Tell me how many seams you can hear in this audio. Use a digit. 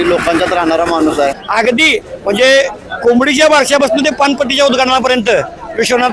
2